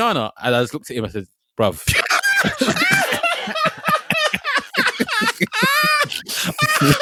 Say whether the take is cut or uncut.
uncut